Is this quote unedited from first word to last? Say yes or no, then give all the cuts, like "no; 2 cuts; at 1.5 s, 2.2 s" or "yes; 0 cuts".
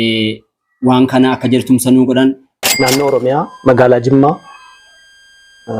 no; 1 cut; at 2.7 s